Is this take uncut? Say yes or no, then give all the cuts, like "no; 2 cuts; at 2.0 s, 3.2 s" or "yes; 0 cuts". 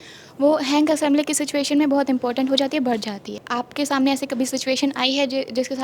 no; 1 cut; at 3.4 s